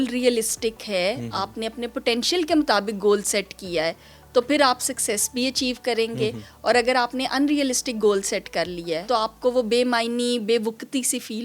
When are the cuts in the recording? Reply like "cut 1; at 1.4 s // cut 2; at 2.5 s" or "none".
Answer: cut 1; at 9.1 s